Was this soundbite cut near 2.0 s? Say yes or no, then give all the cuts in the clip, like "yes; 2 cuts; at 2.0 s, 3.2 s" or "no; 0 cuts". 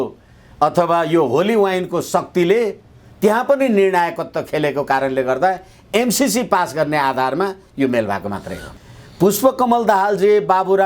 no; 1 cut; at 8.7 s